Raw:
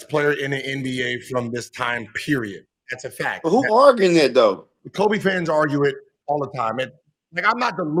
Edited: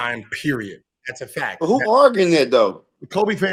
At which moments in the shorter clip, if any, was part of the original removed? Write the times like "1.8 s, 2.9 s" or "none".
none